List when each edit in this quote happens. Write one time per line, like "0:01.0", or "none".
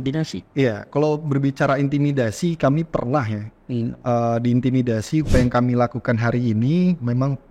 0:05.3